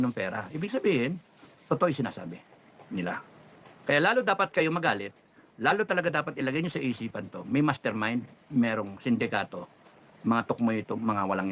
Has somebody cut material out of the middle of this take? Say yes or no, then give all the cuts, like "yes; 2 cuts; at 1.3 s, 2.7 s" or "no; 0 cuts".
no; 0 cuts